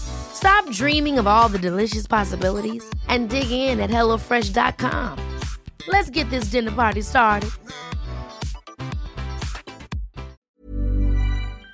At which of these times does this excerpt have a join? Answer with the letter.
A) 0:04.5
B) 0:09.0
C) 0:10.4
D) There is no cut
C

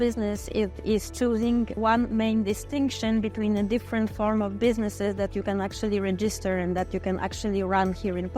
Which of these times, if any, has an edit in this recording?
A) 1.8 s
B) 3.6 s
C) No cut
A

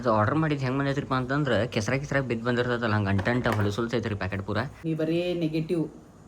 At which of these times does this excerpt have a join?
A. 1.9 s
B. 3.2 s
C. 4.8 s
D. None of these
C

